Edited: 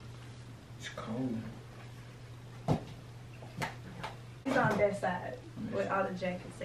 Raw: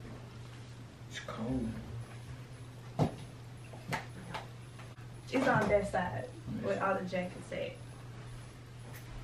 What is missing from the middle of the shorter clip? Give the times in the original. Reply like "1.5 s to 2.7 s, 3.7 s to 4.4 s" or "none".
4.8 s to 5.4 s